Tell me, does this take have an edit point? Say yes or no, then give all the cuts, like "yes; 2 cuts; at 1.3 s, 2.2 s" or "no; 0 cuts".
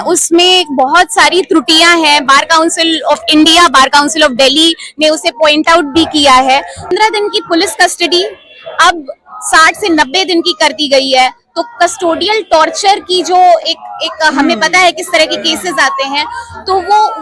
yes; 1 cut; at 6.9 s